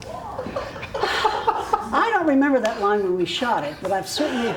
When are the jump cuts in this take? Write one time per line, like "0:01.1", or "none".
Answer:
none